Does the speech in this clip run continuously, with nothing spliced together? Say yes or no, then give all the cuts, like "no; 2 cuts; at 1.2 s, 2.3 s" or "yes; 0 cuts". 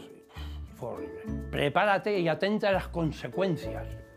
no; 1 cut; at 1.4 s